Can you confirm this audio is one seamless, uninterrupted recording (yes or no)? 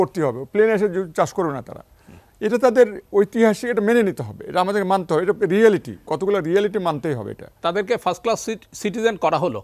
no